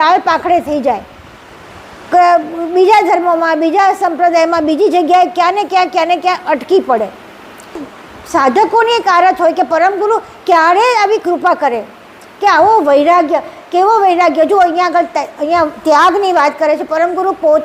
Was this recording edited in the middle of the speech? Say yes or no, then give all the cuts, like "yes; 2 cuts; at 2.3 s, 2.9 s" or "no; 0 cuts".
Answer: yes; 1 cut; at 7.8 s